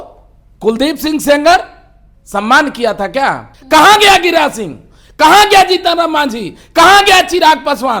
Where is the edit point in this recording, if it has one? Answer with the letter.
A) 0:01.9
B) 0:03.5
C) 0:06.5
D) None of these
B